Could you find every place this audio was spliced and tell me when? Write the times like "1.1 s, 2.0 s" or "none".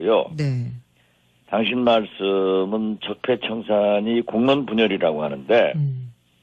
none

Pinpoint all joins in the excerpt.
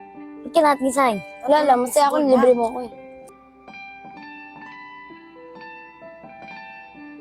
3.3 s

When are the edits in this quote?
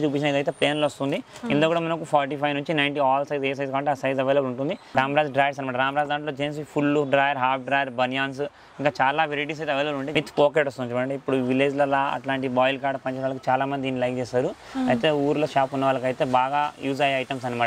4.8 s, 10.0 s

